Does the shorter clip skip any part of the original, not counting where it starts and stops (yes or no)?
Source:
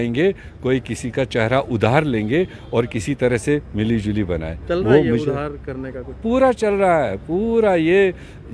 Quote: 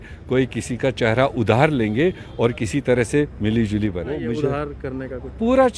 yes